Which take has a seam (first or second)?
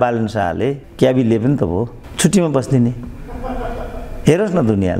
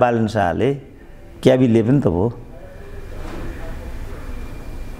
first